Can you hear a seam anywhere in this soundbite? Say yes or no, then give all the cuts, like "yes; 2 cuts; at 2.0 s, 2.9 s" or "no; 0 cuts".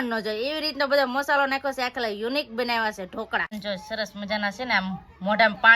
yes; 1 cut; at 3.6 s